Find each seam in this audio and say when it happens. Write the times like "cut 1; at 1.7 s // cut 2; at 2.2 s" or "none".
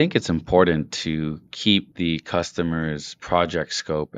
cut 1; at 1.9 s // cut 2; at 3.1 s

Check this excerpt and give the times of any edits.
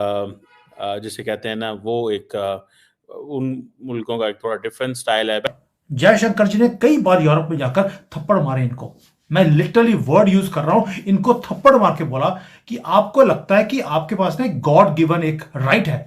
cut 1; at 5.5 s

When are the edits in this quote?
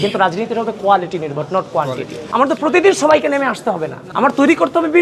cut 1; at 2.2 s

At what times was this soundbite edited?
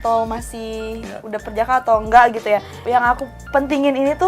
cut 1; at 2.7 s

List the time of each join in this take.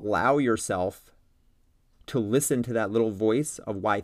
none

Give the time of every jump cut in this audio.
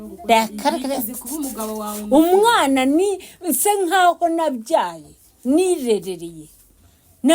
none

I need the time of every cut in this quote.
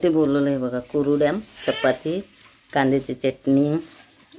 none

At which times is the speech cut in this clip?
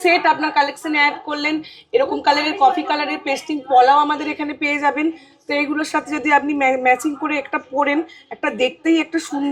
none

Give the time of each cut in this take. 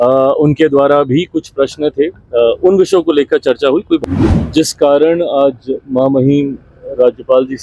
cut 1; at 4.0 s

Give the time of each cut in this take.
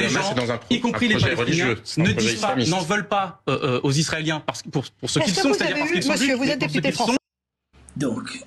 none

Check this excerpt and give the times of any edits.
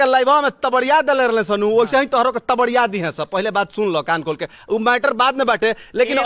none

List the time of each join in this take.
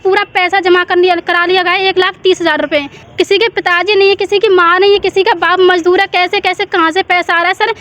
cut 1; at 3.0 s

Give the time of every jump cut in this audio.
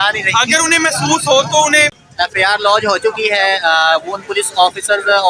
cut 1; at 2.0 s

